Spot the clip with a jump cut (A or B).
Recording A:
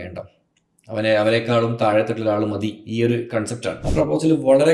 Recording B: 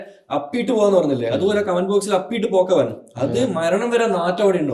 A